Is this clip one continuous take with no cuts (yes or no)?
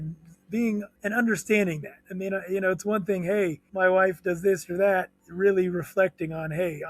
no